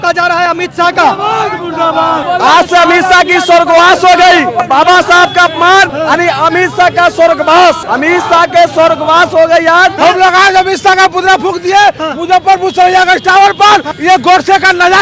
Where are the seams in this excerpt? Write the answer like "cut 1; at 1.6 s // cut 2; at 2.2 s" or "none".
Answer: cut 1; at 2.2 s // cut 2; at 4.6 s // cut 3; at 5.9 s // cut 4; at 7.8 s // cut 5; at 9.9 s // cut 6; at 13.9 s

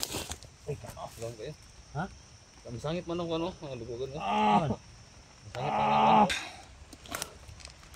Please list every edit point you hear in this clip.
cut 1; at 6.3 s

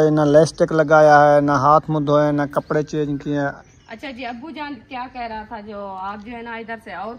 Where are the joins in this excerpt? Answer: cut 1; at 3.5 s

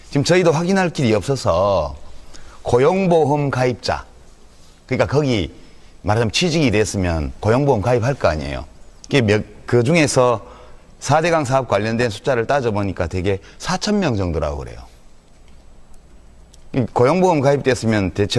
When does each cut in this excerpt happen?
cut 1; at 9.5 s

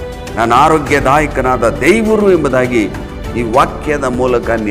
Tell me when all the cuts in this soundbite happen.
none

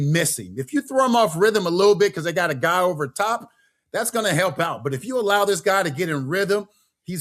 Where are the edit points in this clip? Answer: none

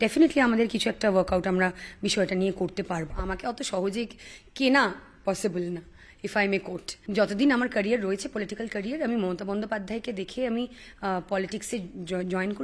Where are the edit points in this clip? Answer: cut 1; at 3.1 s // cut 2; at 7.0 s

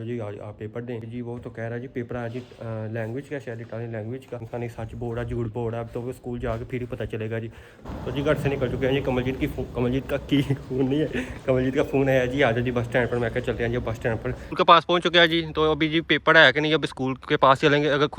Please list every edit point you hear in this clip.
cut 1; at 1.1 s // cut 2; at 4.5 s // cut 3; at 7.8 s // cut 4; at 14.4 s

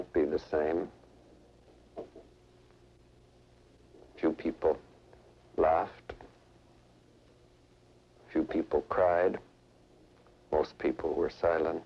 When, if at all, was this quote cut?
none

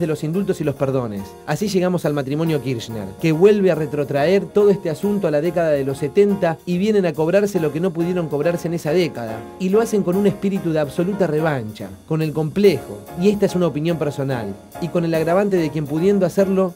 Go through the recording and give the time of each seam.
none

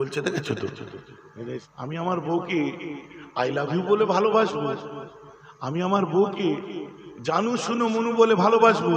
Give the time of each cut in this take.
cut 1; at 1.7 s

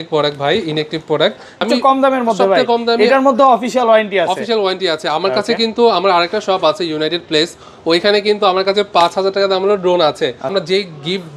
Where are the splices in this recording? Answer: cut 1; at 1.6 s // cut 2; at 10.5 s

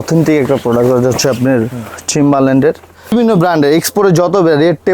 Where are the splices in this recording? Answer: cut 1; at 3.1 s

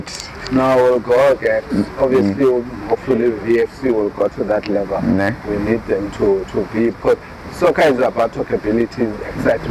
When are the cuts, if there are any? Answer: none

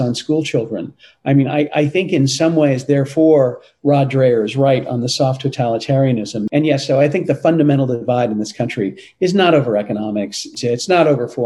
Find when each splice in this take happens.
cut 1; at 6.4 s // cut 2; at 10.5 s

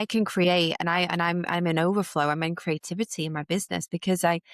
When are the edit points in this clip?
none

